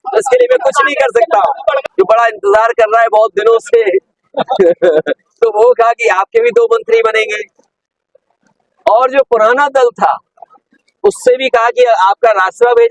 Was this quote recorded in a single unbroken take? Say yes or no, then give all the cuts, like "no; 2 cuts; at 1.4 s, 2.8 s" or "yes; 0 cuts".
no; 1 cut; at 1.8 s